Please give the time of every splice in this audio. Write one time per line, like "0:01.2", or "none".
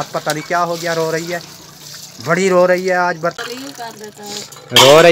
0:03.3